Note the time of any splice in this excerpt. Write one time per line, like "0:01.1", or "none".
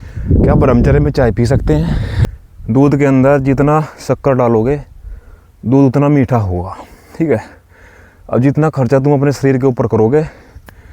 0:02.1